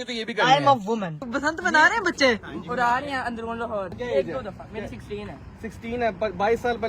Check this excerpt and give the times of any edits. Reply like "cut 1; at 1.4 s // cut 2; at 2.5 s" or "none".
cut 1; at 1.2 s // cut 2; at 4.0 s